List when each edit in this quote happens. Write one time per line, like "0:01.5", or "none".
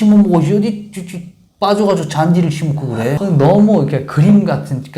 0:03.2